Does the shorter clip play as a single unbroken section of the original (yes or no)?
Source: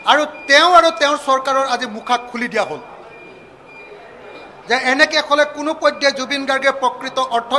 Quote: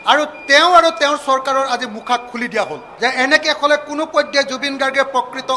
no